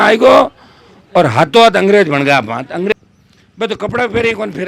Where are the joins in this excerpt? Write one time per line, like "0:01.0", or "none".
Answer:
0:02.9